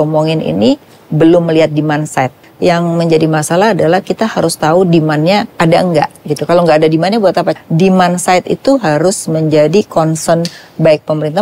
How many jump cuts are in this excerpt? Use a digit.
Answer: 3